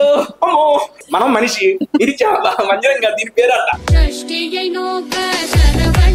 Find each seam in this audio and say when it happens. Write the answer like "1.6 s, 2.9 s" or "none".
1.0 s, 3.8 s